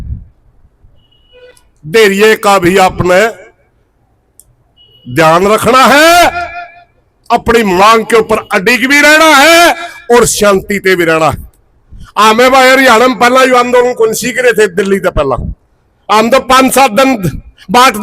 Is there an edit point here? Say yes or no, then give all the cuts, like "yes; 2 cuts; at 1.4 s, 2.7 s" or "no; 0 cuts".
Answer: no; 0 cuts